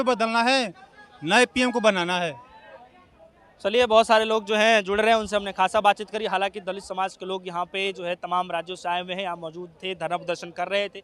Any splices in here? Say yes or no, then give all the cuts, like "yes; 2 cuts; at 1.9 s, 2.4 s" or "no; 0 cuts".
no; 0 cuts